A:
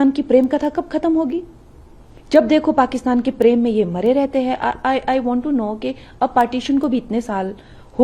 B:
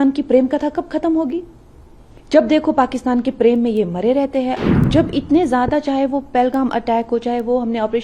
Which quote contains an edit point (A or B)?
B